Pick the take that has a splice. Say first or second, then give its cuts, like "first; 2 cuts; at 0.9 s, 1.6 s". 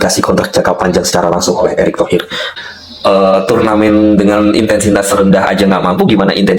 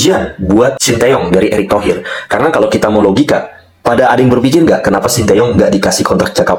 first; 1 cut; at 2.6 s